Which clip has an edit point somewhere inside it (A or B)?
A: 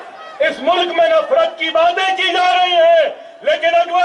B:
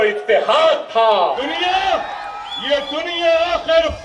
B